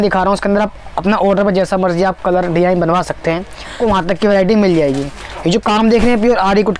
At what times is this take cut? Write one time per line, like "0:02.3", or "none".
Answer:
0:03.7